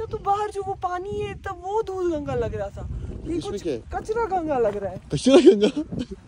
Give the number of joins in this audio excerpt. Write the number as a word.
zero